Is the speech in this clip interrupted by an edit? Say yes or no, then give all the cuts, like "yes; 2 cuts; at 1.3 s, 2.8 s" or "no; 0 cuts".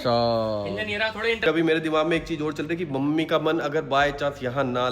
yes; 1 cut; at 1.4 s